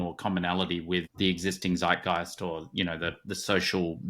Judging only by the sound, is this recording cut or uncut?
cut